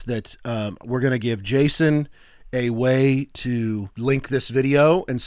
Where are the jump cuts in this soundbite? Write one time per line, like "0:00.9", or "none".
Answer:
0:03.9